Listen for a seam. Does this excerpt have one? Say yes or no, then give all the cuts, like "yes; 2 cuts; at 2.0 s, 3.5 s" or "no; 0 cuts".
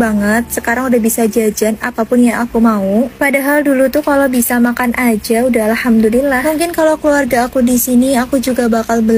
no; 0 cuts